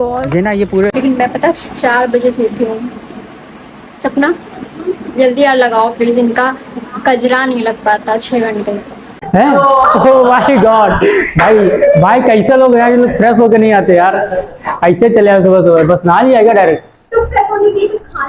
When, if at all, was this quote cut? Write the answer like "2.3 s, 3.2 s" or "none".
0.9 s, 9.5 s